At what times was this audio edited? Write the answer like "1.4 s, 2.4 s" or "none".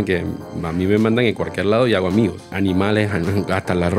2.5 s